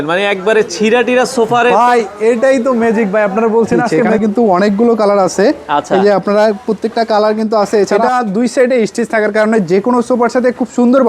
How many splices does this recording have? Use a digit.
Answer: 2